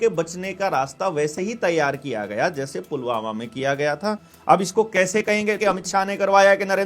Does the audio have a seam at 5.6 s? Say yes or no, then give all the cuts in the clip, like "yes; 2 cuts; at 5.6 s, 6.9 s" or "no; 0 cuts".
yes; 2 cuts; at 4.3 s, 5.6 s